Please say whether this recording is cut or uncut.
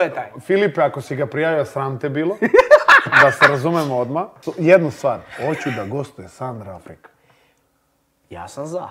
cut